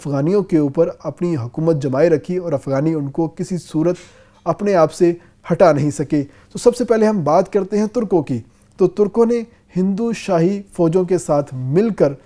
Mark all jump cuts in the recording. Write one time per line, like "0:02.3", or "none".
none